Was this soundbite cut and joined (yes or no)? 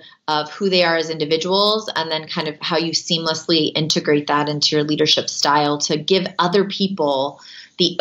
no